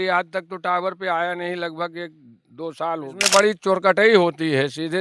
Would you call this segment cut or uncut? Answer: cut